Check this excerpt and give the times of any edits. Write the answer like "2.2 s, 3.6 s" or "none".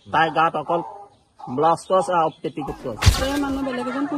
3.2 s